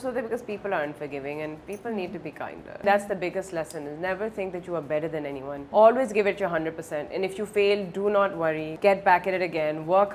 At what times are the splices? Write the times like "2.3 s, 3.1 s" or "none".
2.8 s, 5.6 s, 8.7 s